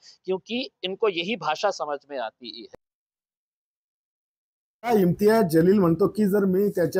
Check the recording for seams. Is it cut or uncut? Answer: uncut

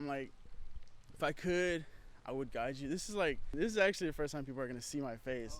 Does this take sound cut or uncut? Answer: cut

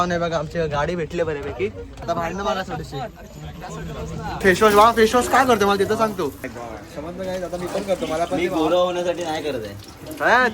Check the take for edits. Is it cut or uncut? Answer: cut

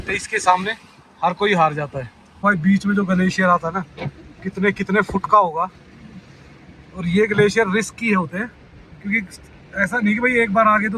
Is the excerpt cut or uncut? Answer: cut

